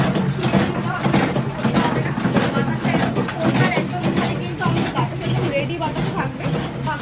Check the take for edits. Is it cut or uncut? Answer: uncut